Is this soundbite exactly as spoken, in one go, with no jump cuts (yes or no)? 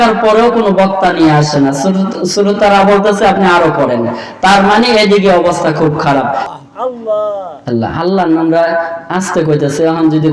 no